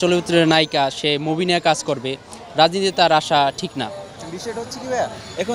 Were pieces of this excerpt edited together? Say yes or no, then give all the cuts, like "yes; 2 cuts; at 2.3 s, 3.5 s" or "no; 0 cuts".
no; 0 cuts